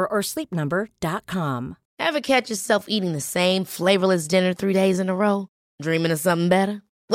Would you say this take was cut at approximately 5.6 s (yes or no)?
no